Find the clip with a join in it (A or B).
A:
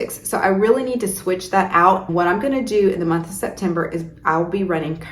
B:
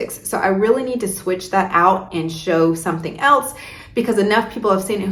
A